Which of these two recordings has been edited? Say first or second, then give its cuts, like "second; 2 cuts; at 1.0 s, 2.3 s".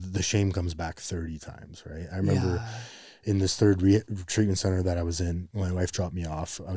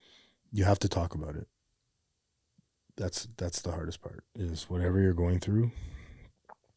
first; 1 cut; at 5.5 s